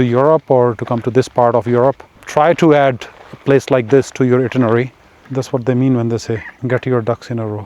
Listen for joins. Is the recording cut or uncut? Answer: cut